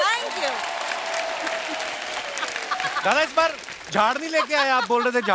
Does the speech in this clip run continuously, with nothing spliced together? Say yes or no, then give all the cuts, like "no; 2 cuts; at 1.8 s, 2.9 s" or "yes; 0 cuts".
no; 1 cut; at 2.7 s